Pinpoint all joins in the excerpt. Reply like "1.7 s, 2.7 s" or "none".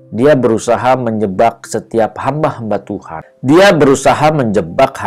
3.3 s